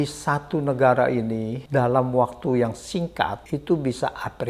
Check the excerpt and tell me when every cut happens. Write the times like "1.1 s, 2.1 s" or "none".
1.5 s, 3.4 s